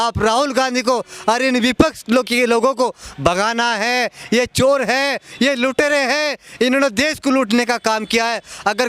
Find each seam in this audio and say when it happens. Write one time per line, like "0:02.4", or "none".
none